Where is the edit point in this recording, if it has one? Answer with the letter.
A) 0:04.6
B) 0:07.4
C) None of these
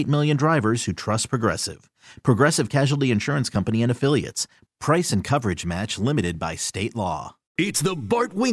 B